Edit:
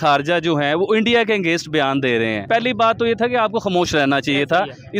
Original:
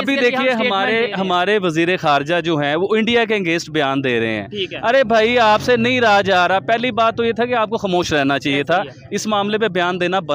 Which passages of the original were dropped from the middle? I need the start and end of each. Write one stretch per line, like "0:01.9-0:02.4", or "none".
0:04.5-0:06.6